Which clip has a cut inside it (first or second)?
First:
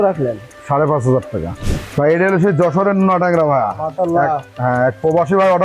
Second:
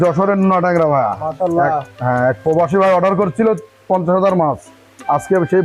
first